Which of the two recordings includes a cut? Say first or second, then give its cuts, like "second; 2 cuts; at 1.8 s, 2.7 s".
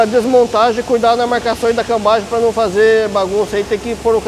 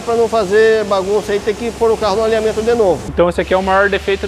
second; 1 cut; at 3.1 s